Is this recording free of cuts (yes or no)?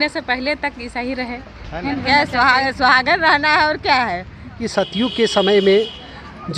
no